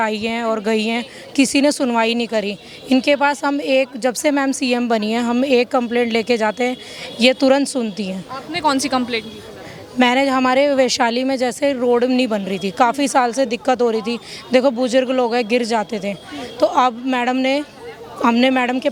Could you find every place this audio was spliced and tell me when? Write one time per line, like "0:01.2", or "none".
none